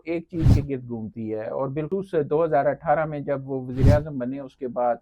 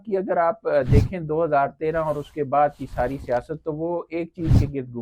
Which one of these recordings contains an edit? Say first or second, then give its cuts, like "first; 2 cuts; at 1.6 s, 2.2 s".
first; 1 cut; at 1.9 s